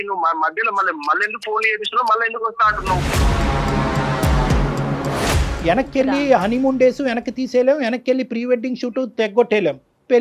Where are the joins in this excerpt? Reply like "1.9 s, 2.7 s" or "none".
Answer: 5.5 s